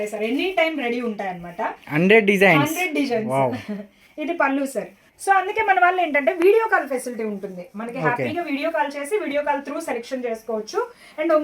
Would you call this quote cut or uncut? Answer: uncut